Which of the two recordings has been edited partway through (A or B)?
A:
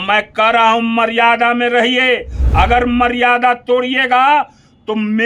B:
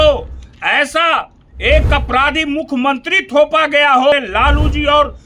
B